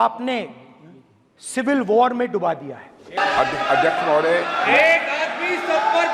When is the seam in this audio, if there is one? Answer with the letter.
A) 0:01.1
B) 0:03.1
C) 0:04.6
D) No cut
B